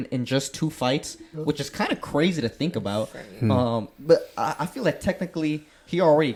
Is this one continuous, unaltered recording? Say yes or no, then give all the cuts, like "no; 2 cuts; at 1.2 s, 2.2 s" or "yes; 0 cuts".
yes; 0 cuts